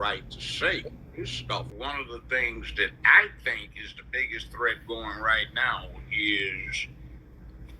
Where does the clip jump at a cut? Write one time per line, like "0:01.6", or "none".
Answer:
0:01.7